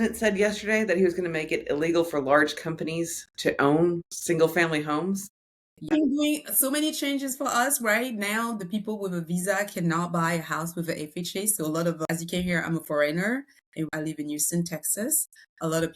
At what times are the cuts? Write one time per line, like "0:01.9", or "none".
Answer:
0:04.1
0:05.9
0:12.0
0:13.9